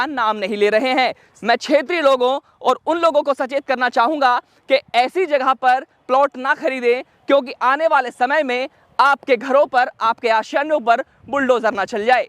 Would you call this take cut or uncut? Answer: cut